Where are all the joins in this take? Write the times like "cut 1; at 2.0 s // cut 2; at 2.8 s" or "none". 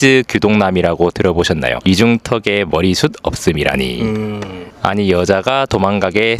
none